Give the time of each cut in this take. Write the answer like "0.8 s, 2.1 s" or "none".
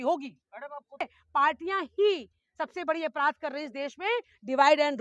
1.0 s